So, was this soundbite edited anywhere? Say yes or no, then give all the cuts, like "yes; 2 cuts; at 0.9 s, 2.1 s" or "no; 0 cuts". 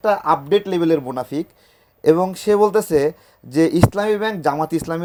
no; 0 cuts